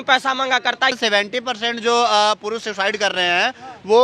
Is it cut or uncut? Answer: cut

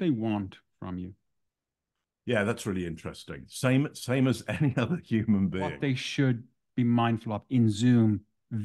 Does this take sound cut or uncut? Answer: cut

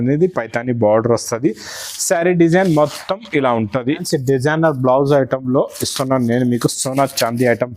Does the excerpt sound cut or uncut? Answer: cut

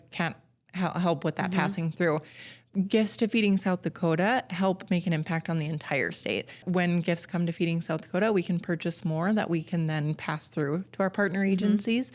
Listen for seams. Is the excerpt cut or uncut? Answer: cut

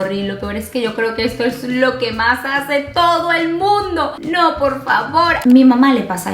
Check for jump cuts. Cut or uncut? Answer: cut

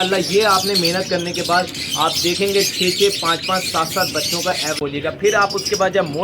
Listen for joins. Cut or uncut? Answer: cut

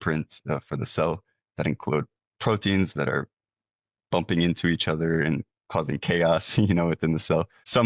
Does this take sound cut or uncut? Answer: uncut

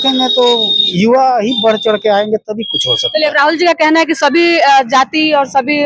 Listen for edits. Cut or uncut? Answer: uncut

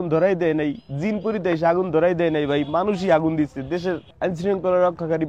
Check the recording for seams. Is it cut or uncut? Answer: cut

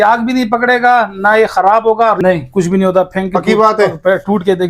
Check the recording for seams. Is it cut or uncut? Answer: cut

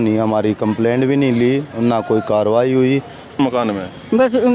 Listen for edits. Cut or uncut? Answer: cut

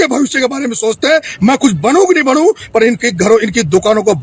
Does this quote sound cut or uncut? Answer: uncut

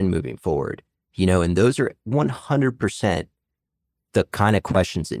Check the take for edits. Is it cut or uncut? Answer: uncut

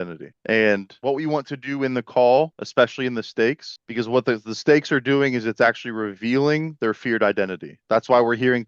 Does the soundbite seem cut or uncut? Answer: cut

